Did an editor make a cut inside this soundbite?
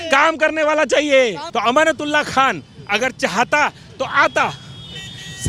yes; 1 cut; at 1.4 s

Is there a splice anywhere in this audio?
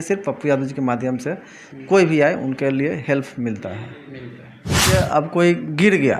yes; 1 cut; at 4.9 s

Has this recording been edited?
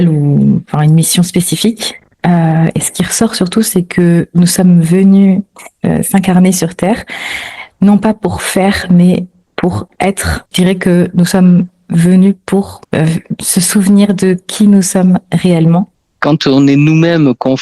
yes; 3 cuts; at 10.5 s, 12.8 s, 16.0 s

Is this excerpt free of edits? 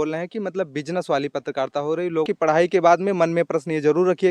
no; 1 cut; at 2.2 s

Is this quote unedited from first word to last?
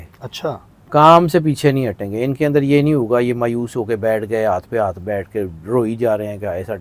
yes; 0 cuts

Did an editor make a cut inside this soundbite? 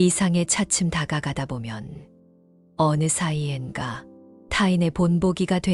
no; 0 cuts

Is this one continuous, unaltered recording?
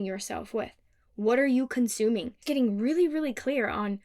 no; 1 cut; at 2.4 s

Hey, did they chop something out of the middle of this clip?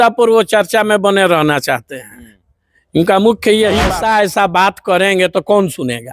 yes; 1 cut; at 3.9 s

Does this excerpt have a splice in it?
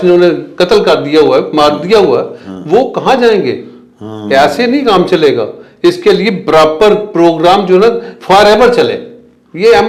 no; 0 cuts

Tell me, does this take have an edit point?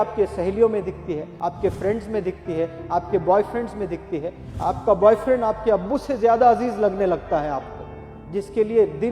yes; 1 cut; at 1.3 s

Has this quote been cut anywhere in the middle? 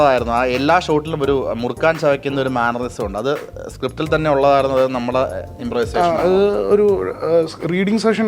no; 0 cuts

